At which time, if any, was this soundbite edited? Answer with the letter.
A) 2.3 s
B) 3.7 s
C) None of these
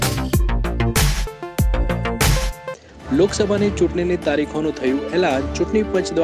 A